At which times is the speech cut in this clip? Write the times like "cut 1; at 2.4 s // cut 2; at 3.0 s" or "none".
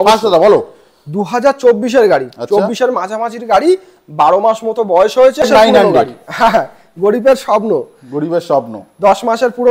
cut 1; at 5.4 s